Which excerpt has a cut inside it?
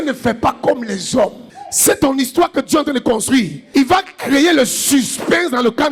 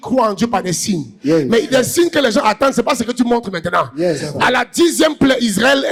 first; 1 cut; at 1.4 s

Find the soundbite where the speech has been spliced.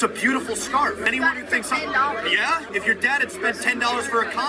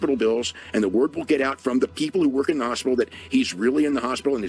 first; 2 cuts; at 1.1 s, 2.7 s

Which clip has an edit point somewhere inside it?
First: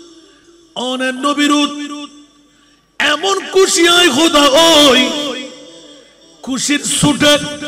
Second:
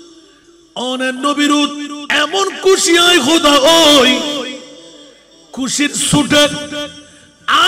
second; 1 cut; at 2.0 s

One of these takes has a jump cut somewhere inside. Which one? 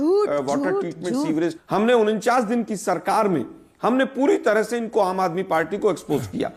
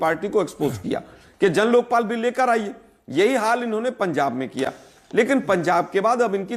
first; 1 cut; at 1.5 s

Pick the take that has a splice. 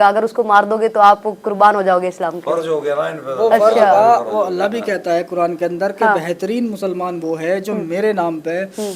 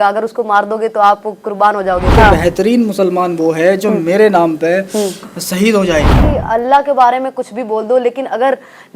second; 2 cuts; at 2.1 s, 6.2 s

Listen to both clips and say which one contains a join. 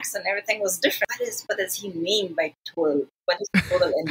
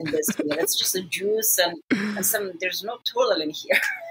first; 1 cut; at 1.1 s

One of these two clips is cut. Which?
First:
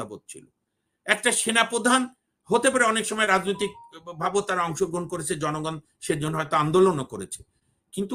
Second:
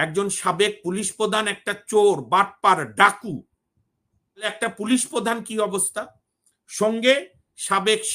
second; 1 cut; at 4.5 s

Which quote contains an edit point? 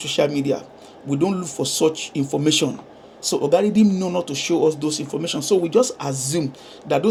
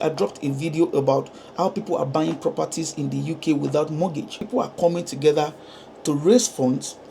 second; 1 cut; at 4.4 s

